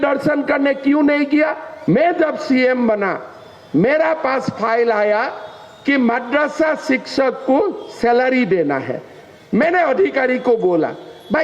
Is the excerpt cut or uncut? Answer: cut